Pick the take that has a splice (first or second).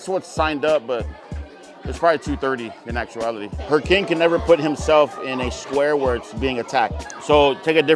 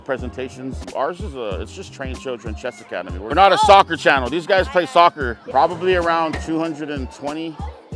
second